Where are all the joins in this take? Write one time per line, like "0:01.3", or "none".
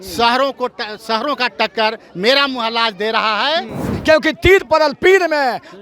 0:03.8